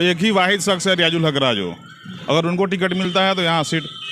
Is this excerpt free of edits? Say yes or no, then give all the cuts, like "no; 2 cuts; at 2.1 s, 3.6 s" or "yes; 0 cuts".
yes; 0 cuts